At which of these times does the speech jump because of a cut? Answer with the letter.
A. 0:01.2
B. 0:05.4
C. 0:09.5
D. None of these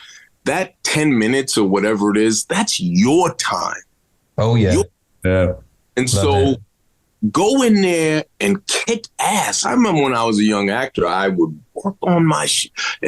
C